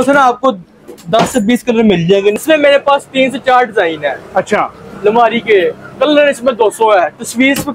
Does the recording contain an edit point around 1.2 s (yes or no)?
no